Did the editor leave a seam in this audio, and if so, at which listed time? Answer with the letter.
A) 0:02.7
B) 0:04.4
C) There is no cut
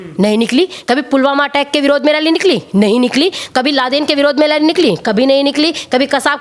C